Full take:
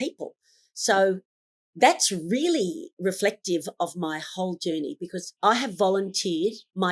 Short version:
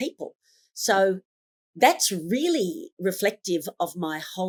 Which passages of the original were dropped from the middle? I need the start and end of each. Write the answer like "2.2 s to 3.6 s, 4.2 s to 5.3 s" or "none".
none